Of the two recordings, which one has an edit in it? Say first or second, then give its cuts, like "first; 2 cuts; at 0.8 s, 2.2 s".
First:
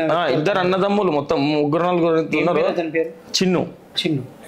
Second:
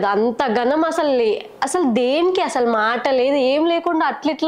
first; 1 cut; at 3.2 s